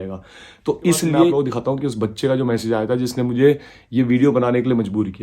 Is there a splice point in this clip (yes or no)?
yes